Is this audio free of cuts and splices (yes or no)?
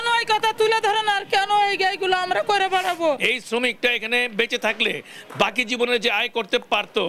no